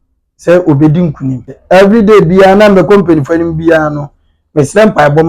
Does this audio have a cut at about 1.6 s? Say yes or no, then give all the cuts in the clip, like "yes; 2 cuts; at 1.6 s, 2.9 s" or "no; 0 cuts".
yes; 1 cut; at 1.6 s